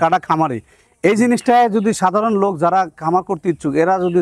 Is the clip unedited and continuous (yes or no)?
yes